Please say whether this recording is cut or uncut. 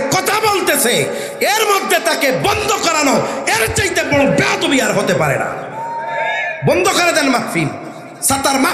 uncut